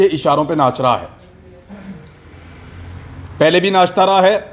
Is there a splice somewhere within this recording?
no; 0 cuts

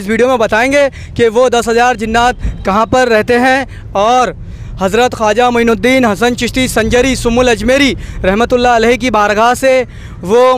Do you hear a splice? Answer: no; 0 cuts

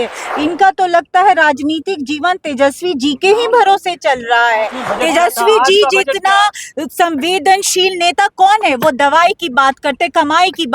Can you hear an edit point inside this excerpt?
yes; 1 cut; at 4.8 s

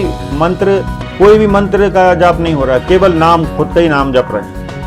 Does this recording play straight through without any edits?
no; 1 cut; at 1.0 s

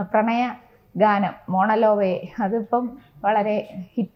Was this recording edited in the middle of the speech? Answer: no; 0 cuts

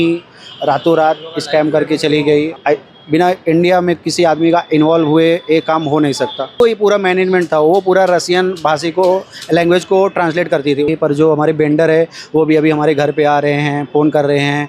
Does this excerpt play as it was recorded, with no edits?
no; 3 cuts; at 2.5 s, 6.6 s, 10.9 s

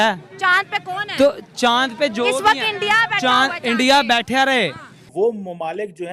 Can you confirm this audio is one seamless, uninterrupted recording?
no; 1 cut; at 5.2 s

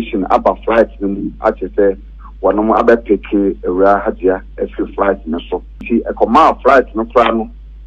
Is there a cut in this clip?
yes; 1 cut; at 5.8 s

